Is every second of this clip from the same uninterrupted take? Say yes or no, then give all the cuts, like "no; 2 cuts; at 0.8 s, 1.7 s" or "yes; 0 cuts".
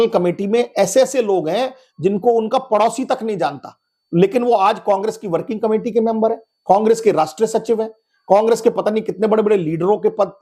yes; 0 cuts